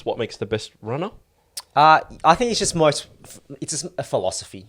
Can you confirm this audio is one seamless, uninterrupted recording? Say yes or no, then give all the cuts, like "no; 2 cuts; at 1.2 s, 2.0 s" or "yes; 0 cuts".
yes; 0 cuts